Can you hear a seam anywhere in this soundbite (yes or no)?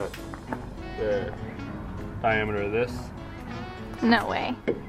no